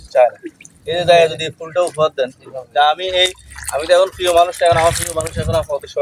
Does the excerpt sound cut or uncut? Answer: uncut